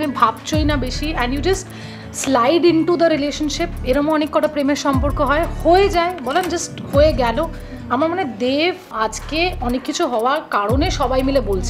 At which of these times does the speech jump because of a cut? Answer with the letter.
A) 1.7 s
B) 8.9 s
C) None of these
B